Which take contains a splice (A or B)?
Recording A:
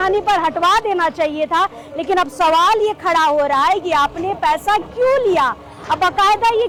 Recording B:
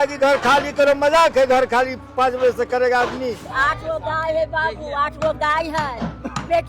B